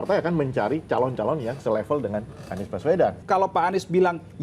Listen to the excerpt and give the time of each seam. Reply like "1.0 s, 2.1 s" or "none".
3.2 s